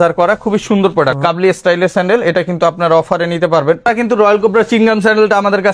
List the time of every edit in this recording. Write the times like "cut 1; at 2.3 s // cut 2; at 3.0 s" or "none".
cut 1; at 1.2 s // cut 2; at 4.1 s